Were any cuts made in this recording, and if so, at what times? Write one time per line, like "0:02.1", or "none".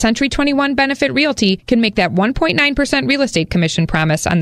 none